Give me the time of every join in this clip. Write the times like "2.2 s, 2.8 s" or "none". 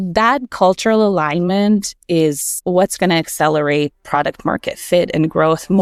none